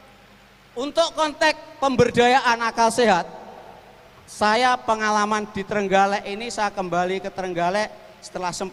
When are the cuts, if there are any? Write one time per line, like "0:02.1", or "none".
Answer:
none

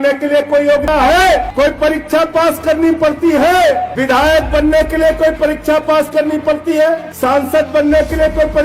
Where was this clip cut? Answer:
0:00.8
0:01.5
0:03.9
0:07.1

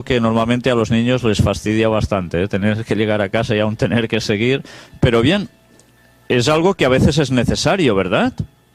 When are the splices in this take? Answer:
0:07.8

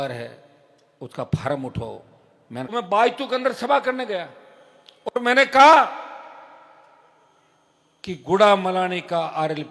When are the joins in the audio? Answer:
0:02.7

